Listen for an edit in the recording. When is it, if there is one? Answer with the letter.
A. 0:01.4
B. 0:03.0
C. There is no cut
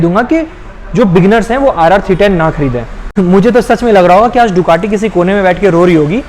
B